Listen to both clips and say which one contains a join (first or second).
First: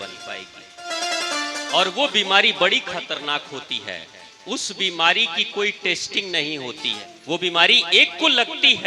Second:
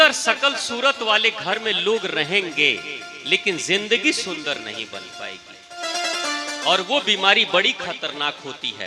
first